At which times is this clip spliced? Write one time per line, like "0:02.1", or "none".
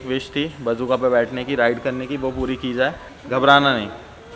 0:03.1